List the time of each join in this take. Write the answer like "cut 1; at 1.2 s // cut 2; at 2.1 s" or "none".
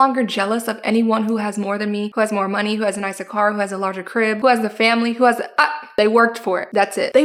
none